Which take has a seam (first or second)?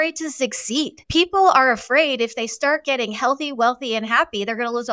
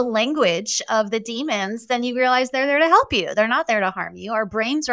first